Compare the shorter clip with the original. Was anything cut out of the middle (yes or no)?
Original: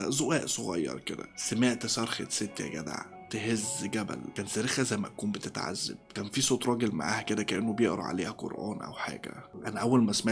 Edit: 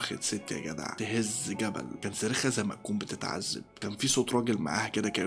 yes